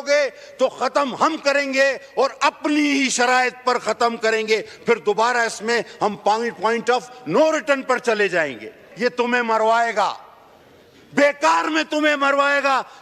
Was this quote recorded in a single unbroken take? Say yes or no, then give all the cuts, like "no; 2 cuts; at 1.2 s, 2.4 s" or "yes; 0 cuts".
no; 1 cut; at 8.9 s